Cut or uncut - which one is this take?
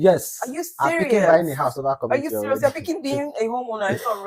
uncut